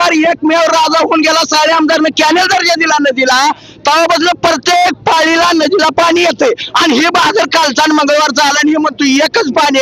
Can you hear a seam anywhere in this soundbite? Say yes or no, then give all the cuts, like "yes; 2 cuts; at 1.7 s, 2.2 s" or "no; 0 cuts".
no; 0 cuts